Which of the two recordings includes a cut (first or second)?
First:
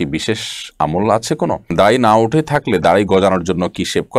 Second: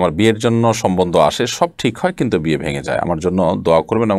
first